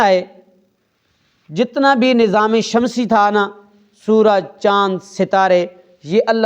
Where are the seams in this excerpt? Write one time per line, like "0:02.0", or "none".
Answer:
none